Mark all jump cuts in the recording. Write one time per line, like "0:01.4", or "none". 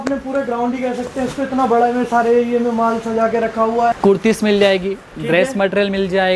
0:04.0